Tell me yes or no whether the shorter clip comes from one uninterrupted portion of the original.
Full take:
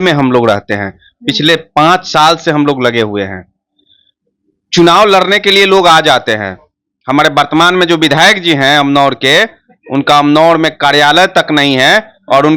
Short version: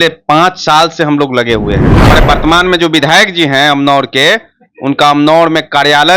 no